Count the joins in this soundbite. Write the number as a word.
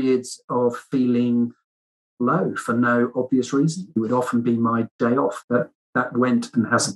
one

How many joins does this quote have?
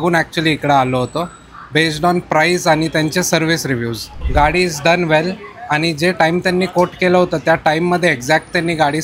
one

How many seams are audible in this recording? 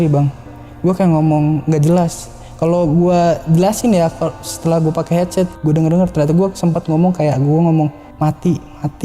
one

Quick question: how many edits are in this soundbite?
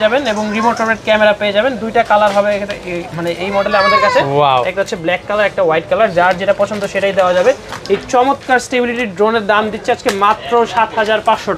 zero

